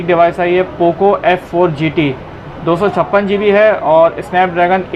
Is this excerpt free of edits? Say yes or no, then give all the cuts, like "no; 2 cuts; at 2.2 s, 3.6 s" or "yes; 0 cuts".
yes; 0 cuts